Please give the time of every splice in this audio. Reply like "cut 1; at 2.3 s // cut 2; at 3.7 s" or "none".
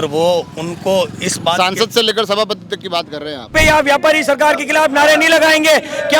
cut 1; at 3.5 s